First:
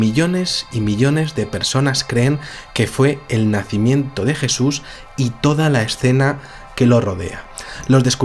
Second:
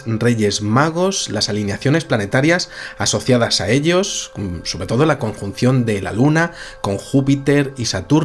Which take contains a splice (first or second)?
second